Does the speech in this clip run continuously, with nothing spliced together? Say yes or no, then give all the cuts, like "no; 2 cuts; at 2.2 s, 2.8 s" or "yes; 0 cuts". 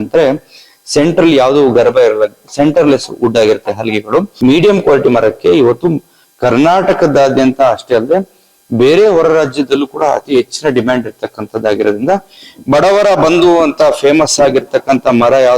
no; 2 cuts; at 4.3 s, 12.3 s